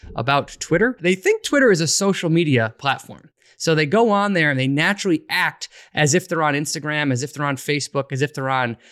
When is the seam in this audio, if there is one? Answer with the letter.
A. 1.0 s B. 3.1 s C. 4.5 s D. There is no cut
A